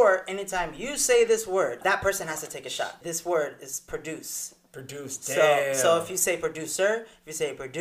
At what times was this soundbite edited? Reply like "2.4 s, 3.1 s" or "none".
1.8 s, 3.0 s